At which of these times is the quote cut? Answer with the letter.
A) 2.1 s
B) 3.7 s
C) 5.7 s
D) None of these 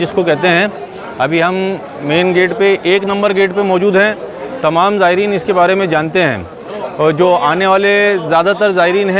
D